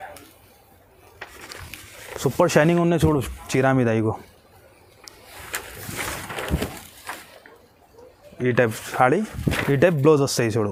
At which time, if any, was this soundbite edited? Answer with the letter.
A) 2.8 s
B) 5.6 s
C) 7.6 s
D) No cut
D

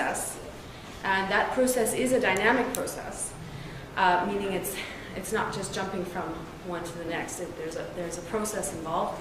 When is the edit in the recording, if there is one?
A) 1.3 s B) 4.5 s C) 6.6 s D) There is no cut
B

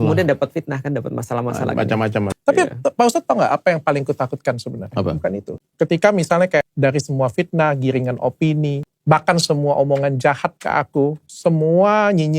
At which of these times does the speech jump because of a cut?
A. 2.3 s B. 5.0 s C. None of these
A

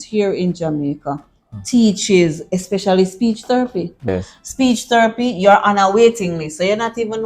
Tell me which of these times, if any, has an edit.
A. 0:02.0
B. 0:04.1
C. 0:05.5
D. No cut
B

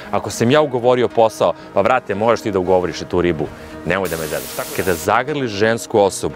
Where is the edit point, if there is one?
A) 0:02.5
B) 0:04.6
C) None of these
B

